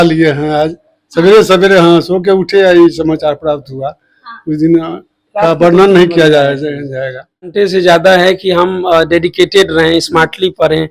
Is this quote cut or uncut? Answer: cut